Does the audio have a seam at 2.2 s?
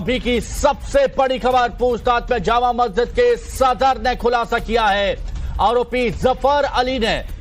yes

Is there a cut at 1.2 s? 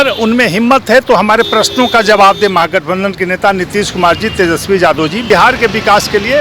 no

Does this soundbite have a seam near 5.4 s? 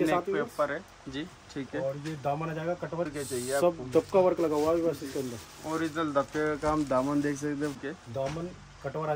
no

